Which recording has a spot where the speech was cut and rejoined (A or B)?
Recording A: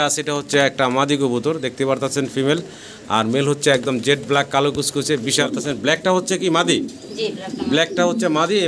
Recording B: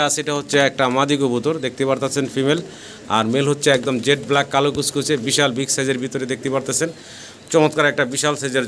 A